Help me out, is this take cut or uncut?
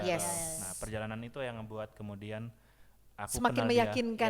uncut